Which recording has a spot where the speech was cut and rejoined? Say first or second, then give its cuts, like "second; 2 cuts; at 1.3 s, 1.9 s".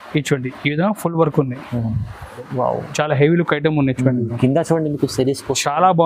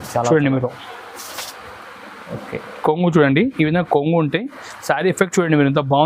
first; 1 cut; at 2.5 s